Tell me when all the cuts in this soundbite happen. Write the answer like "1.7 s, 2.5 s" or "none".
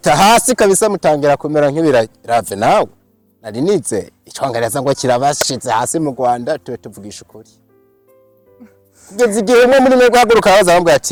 none